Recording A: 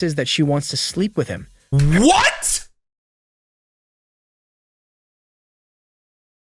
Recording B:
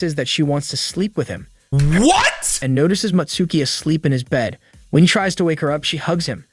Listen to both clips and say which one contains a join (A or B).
B